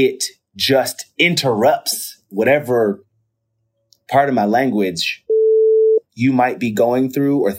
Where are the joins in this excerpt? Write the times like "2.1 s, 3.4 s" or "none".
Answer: none